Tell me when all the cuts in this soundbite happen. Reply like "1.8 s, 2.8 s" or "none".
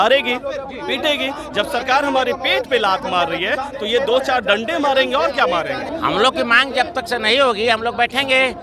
none